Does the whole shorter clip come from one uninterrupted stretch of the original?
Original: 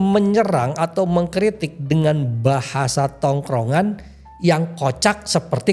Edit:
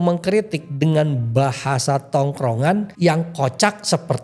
no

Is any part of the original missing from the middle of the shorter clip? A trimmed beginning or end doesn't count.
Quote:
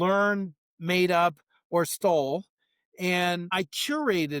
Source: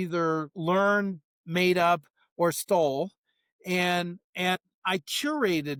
yes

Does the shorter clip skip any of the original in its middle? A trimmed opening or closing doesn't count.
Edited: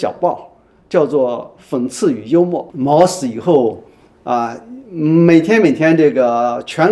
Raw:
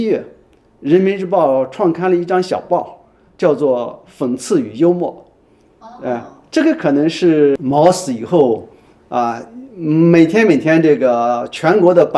yes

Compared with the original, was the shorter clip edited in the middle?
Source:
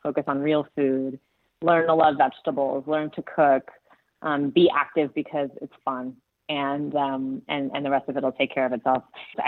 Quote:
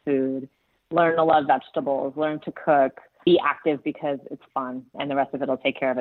yes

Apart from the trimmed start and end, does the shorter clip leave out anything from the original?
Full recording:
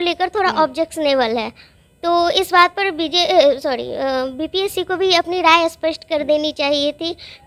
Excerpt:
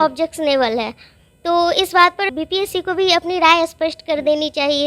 yes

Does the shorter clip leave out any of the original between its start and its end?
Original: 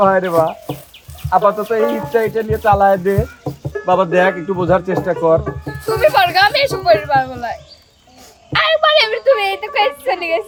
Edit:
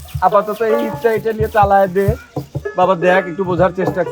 no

